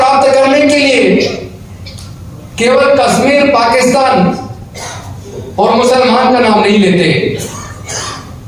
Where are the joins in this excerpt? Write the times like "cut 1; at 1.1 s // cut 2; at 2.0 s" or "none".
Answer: none